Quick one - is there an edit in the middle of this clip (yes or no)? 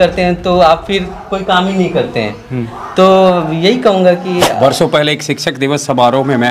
yes